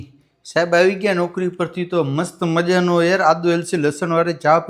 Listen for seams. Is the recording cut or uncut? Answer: uncut